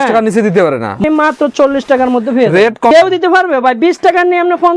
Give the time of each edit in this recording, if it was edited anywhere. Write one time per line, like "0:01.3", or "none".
0:01.0
0:02.9